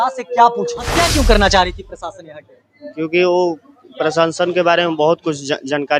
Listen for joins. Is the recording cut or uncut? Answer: cut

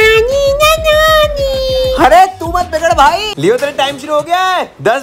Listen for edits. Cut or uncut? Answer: cut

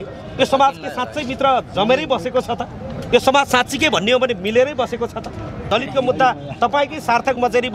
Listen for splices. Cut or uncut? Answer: cut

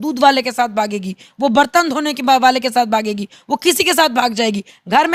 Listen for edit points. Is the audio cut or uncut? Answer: uncut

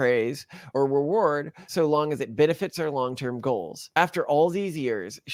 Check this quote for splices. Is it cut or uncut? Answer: uncut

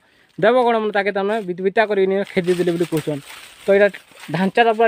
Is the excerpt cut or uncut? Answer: uncut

